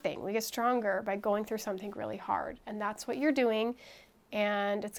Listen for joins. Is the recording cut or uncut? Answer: uncut